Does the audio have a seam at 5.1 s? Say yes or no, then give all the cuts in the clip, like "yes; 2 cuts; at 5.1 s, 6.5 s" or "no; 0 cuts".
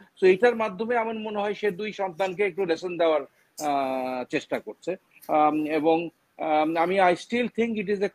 no; 0 cuts